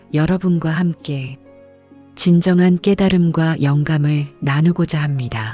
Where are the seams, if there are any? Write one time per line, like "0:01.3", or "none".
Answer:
none